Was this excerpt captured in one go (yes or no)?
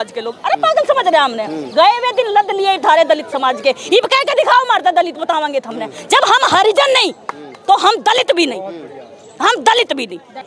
yes